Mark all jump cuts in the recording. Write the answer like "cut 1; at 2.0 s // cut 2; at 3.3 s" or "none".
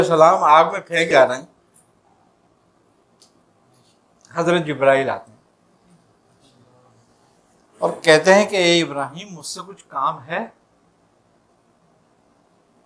cut 1; at 1.1 s